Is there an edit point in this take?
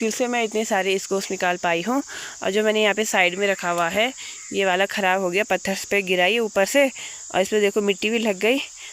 no; 0 cuts

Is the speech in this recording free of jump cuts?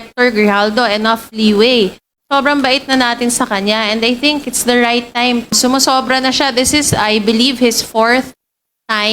no; 1 cut; at 5.5 s

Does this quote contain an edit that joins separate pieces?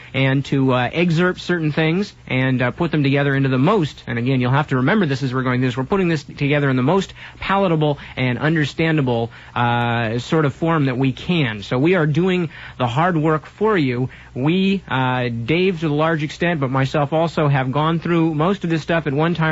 yes; 1 cut; at 12.6 s

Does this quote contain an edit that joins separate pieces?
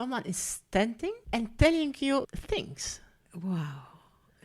yes; 2 cuts; at 1.2 s, 2.4 s

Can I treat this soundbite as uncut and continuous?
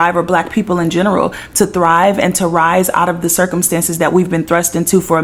yes; 0 cuts

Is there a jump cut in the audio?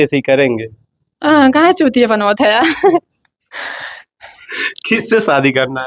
no; 0 cuts

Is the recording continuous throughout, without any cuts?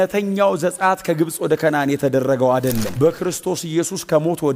yes; 0 cuts

